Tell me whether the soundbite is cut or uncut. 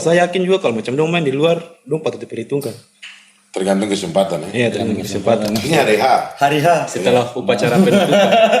cut